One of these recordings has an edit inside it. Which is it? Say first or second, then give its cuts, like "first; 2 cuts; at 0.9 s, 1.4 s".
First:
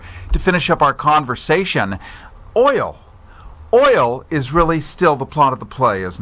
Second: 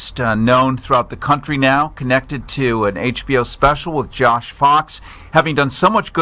second; 1 cut; at 3.0 s